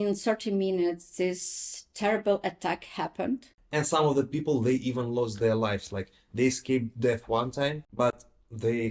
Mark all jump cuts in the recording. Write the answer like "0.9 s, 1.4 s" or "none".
3.5 s, 7.8 s

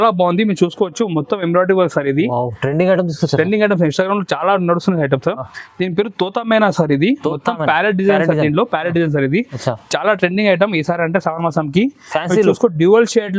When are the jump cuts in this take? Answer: none

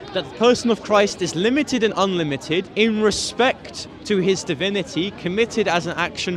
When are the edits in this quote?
2.7 s

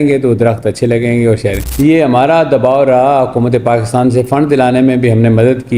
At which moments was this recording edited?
1.6 s

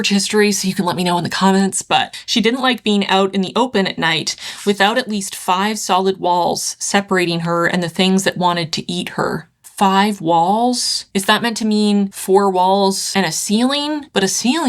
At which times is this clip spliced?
2.1 s

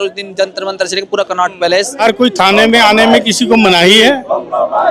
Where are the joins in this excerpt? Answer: 2.0 s

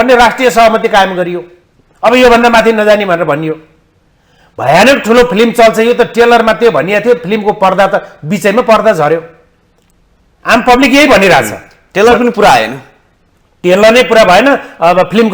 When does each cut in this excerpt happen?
none

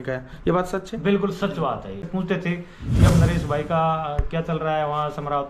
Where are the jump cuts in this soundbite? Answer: 2.0 s

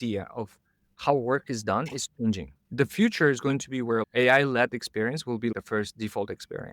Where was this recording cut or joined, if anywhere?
2.6 s, 4.0 s, 5.5 s

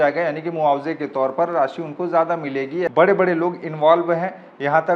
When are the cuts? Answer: 2.9 s

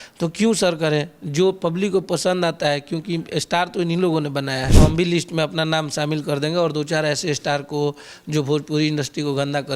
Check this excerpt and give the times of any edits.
4.7 s

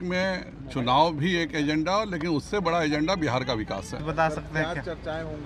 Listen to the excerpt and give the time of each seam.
none

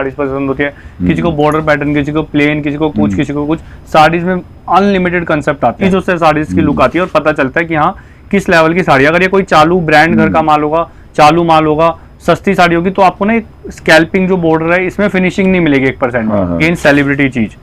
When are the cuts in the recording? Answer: 5.8 s, 16.6 s

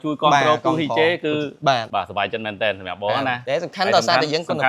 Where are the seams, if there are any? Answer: none

